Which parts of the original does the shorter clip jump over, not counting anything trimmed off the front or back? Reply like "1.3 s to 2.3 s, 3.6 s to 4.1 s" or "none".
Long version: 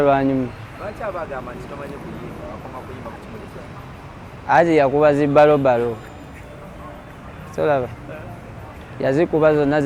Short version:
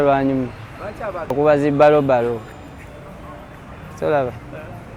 1.3 s to 4.9 s